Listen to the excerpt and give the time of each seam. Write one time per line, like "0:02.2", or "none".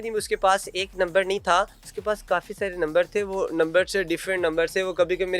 0:01.8